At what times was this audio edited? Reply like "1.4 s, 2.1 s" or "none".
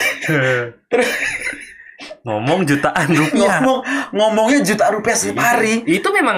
none